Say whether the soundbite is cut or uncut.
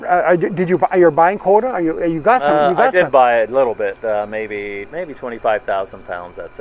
cut